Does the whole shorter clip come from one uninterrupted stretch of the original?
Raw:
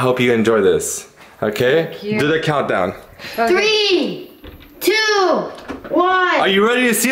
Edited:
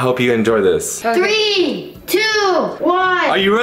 no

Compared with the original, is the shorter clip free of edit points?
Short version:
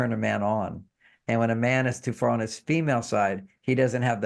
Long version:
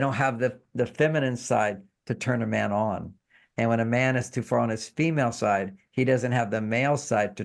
yes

